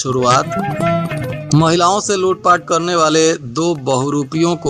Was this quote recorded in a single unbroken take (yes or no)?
yes